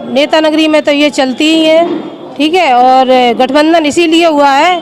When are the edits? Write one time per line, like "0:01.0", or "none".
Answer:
none